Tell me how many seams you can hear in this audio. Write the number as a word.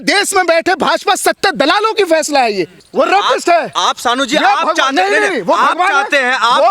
one